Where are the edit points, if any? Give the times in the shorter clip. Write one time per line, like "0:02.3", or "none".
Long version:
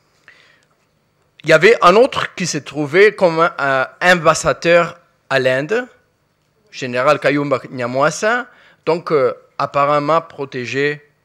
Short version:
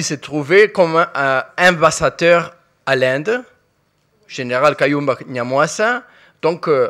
none

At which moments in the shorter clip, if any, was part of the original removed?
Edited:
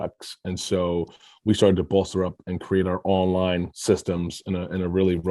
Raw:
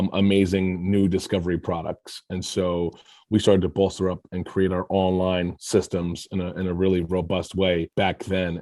none

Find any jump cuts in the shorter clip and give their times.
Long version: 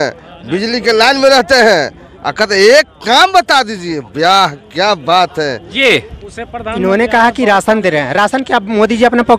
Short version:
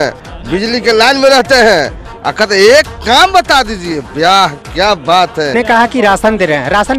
0:05.5

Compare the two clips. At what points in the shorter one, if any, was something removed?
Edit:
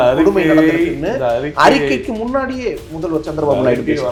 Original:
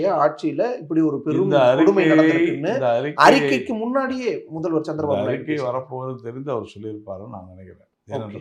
none

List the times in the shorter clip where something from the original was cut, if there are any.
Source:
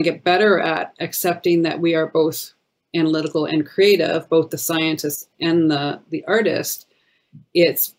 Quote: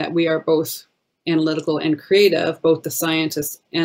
none

